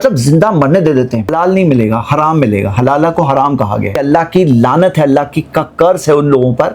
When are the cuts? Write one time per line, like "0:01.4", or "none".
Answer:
0:01.3
0:03.9